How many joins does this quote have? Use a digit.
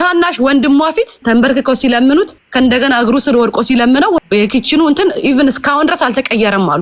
3